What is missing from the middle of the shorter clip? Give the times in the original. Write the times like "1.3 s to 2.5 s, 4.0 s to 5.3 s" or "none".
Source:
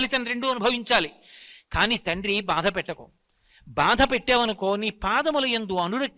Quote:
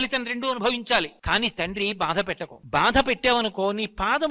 1.2 s to 1.6 s, 3.0 s to 3.6 s